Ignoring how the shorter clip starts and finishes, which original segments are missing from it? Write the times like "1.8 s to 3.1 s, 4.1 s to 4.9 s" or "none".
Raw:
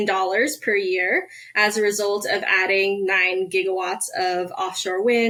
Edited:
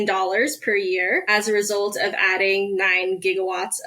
1.2 s to 1.5 s